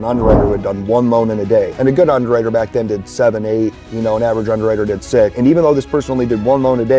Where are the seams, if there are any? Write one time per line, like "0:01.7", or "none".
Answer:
0:01.7
0:05.3